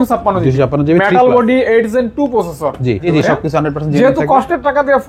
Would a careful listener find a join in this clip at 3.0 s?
yes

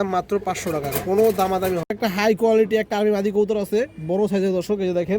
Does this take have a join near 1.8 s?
yes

